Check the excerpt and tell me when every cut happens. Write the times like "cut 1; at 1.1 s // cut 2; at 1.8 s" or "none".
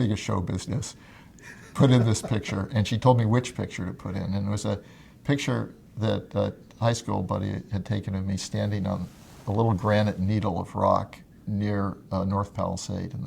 cut 1; at 11.3 s